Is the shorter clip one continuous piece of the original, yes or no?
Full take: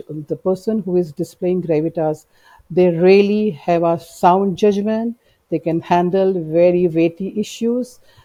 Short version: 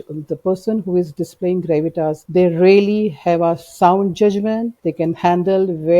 no